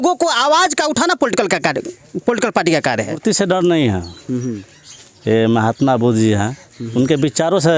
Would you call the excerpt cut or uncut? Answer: cut